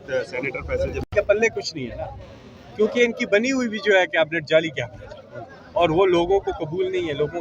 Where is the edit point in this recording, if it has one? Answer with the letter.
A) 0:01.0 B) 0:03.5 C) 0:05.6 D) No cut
A